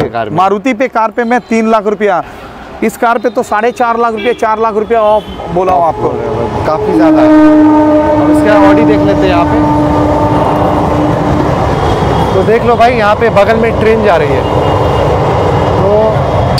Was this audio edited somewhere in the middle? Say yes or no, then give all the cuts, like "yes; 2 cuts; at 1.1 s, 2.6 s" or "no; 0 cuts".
no; 0 cuts